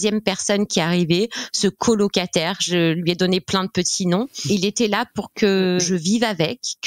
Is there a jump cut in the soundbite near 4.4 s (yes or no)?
yes